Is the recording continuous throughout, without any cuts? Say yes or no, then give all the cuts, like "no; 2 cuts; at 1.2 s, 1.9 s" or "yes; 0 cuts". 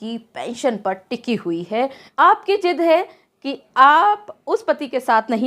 no; 1 cut; at 2.0 s